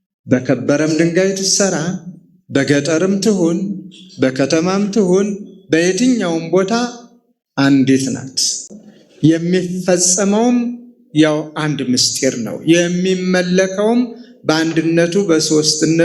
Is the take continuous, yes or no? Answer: yes